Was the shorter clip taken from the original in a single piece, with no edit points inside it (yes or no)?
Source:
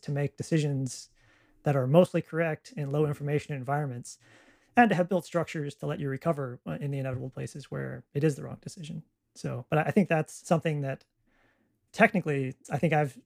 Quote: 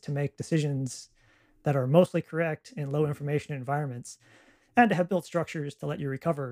yes